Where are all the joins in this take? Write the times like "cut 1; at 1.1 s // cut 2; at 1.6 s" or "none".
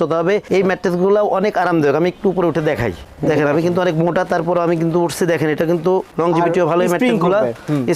none